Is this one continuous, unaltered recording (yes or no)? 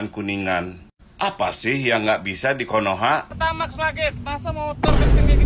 no